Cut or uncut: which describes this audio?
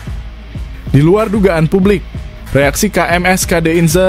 cut